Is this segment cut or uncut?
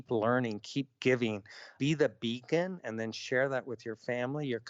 cut